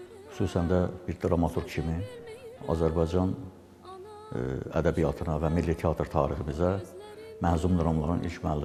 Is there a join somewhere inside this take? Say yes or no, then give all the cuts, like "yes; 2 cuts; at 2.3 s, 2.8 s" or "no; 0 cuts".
no; 0 cuts